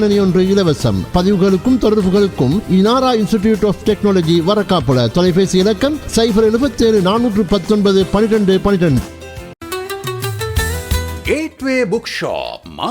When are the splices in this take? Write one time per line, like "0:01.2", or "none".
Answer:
0:09.5